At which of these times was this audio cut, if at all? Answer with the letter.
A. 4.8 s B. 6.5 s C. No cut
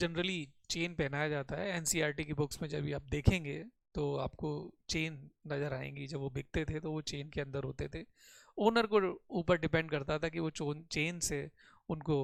C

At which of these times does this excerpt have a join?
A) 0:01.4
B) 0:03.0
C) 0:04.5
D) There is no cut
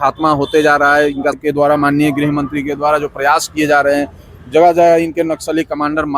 A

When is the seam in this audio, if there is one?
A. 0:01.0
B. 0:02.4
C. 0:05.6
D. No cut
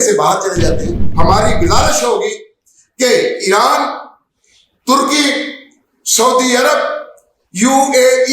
A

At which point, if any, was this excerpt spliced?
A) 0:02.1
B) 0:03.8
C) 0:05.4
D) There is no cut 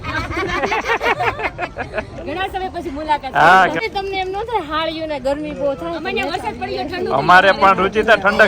B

